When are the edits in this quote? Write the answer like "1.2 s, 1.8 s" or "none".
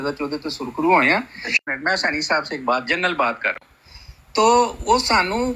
1.6 s